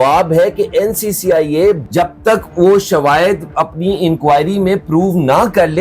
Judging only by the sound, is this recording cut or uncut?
cut